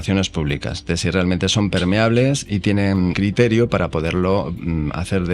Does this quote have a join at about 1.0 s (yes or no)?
no